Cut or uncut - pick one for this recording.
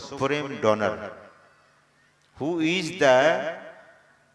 uncut